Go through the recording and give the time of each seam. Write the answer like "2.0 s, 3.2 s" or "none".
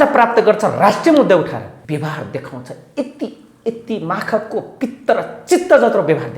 1.8 s